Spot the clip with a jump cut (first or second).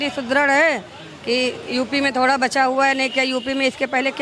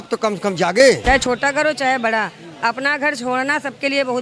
second